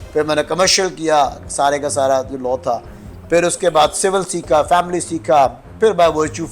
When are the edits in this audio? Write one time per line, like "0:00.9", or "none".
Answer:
none